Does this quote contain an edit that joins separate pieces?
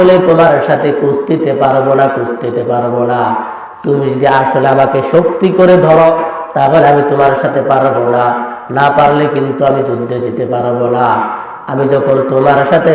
no; 0 cuts

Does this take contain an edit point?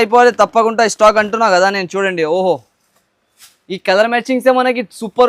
no; 0 cuts

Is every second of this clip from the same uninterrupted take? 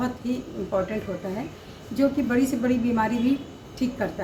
yes; 0 cuts

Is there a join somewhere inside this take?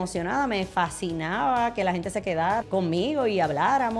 yes; 1 cut; at 2.6 s

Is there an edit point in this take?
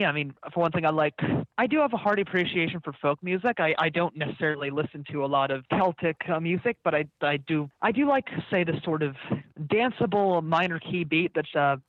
yes; 4 cuts; at 1.5 s, 5.6 s, 7.7 s, 9.5 s

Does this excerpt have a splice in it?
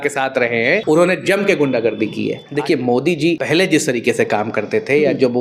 yes; 3 cuts; at 0.8 s, 2.4 s, 3.4 s

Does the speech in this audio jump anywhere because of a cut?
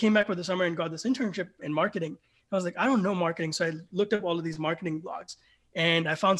no; 0 cuts

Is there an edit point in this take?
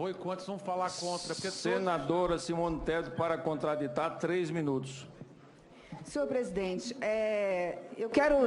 yes; 1 cut; at 5.8 s

